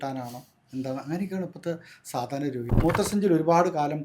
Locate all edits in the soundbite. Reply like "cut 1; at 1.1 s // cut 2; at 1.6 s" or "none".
cut 1; at 2.7 s